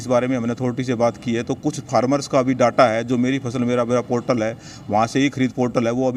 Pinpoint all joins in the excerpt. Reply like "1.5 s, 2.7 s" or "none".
none